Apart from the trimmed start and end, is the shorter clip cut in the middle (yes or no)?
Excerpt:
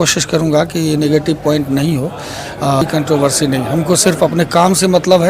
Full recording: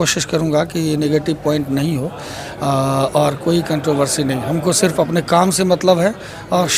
yes